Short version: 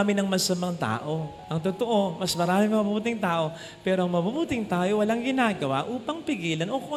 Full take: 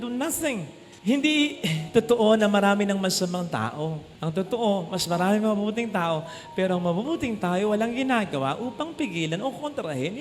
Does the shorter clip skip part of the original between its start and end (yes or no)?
no